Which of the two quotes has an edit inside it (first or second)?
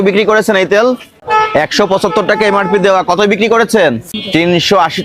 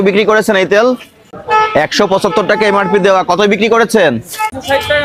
first